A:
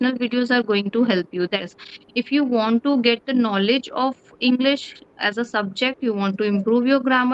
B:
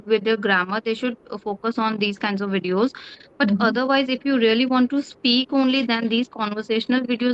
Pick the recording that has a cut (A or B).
A